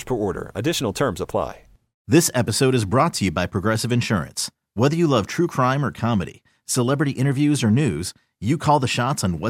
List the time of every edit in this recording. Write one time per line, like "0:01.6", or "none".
0:01.9